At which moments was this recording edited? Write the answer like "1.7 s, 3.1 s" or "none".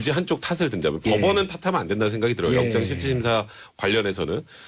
1.6 s